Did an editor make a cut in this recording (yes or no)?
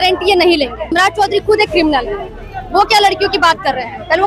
yes